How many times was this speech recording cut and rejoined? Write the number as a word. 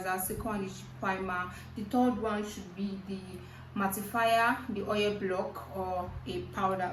zero